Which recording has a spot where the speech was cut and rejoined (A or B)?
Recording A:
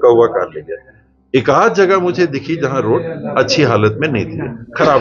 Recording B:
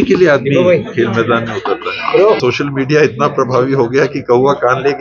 B